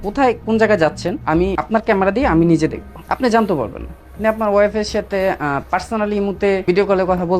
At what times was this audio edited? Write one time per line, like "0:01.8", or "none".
0:01.4
0:02.9
0:04.1
0:06.6

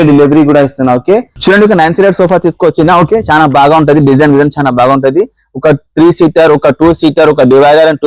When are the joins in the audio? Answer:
0:01.3

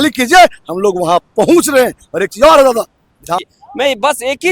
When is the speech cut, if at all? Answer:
0:03.4

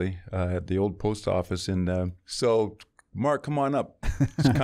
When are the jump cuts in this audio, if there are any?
0:02.2

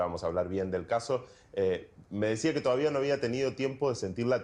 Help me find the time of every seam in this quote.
0:02.6

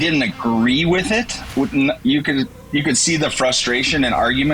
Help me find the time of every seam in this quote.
none

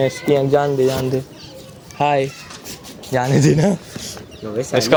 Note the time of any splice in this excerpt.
none

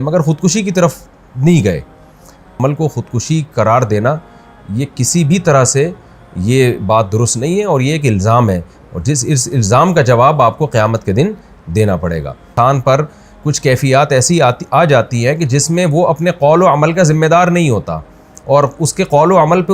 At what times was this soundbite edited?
0:02.5
0:12.5

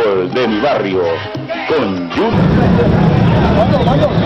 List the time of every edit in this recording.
0:02.3

